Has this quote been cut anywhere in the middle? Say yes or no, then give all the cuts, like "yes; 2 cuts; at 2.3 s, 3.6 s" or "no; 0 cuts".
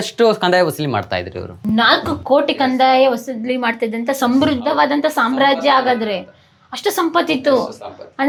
no; 0 cuts